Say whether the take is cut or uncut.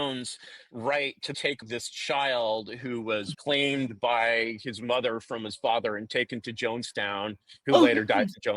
cut